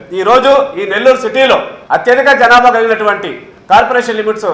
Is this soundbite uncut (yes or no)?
no